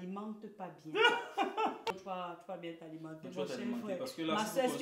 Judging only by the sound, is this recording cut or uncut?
cut